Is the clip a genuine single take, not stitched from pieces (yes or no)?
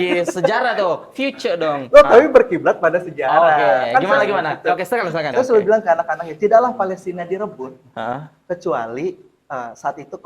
no